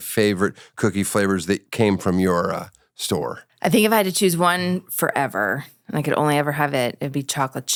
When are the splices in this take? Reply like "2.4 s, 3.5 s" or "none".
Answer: none